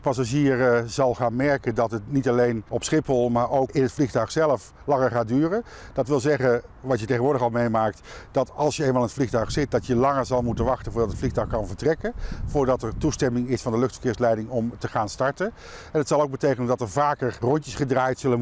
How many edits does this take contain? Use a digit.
0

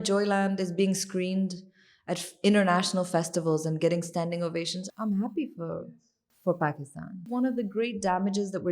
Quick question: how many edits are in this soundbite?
2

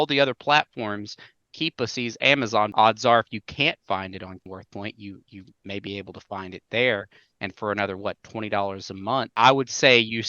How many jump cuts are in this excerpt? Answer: 3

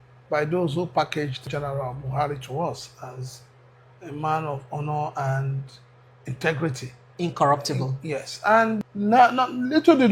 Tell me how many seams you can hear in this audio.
2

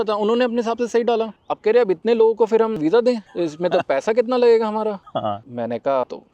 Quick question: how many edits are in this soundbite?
1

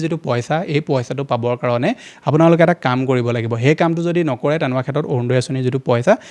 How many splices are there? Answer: 0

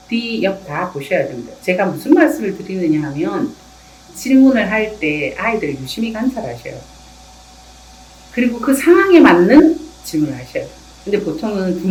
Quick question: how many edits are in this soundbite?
0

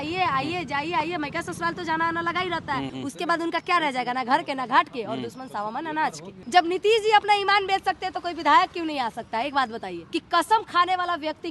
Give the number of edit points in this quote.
3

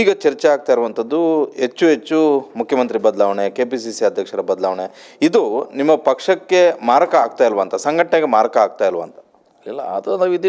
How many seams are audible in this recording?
0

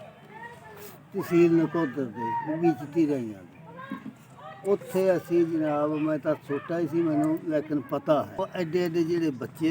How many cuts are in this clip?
1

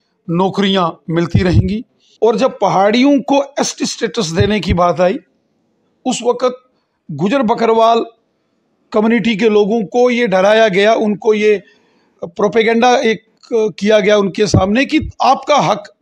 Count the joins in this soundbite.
1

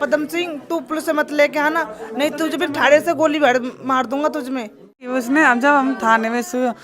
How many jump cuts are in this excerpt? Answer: 1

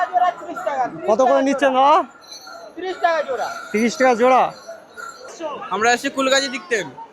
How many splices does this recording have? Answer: 1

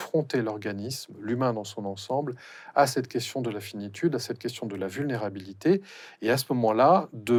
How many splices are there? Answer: 0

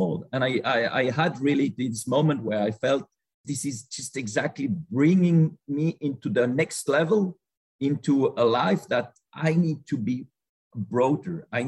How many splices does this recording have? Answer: 0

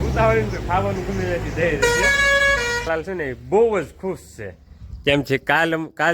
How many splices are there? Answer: 1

